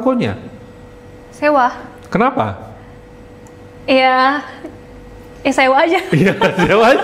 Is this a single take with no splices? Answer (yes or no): yes